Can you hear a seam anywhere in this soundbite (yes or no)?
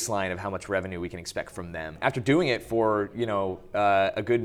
yes